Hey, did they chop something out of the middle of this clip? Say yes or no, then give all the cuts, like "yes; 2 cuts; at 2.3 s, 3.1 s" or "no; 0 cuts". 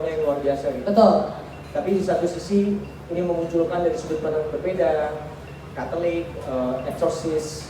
no; 0 cuts